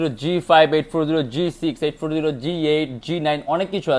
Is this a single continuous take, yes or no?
yes